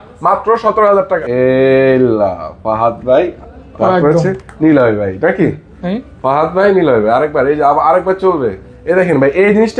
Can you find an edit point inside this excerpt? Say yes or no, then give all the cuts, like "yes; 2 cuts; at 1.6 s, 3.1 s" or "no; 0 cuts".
yes; 1 cut; at 1.2 s